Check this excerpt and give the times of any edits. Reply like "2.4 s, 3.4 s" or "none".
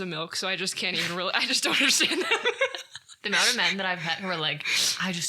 3.1 s